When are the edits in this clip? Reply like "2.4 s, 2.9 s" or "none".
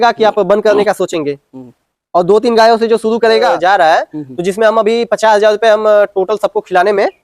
3.5 s